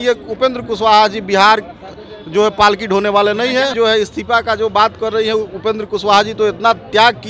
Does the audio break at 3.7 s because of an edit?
yes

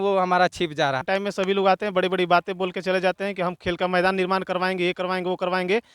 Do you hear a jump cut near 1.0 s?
yes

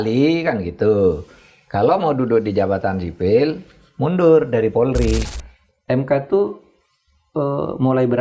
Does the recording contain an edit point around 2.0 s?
no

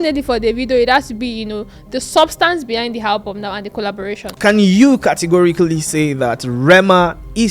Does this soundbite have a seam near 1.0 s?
no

